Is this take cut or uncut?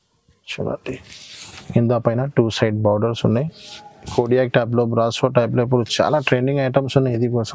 uncut